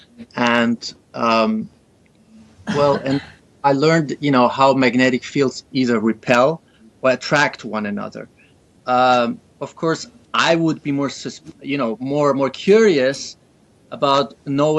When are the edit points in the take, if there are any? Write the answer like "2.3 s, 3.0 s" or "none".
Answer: 12.4 s